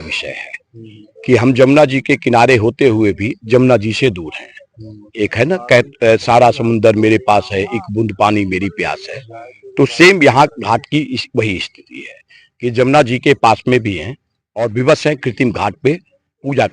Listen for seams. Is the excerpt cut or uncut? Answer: uncut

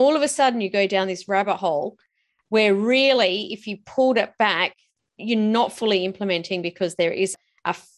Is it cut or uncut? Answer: uncut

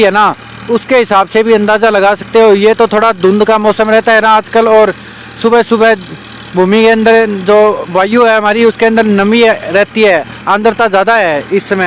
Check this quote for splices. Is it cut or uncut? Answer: uncut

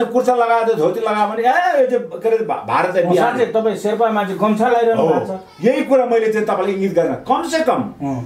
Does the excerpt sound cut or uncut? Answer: uncut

